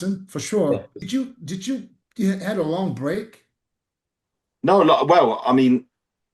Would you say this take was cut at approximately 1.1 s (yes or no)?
yes